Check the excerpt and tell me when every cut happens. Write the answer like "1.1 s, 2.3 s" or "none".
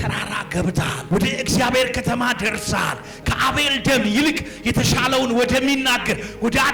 1.0 s